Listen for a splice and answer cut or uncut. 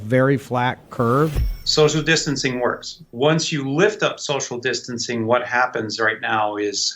cut